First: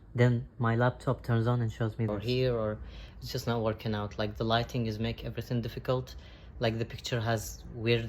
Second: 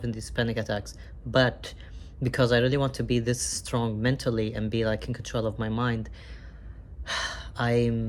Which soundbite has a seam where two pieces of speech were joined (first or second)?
first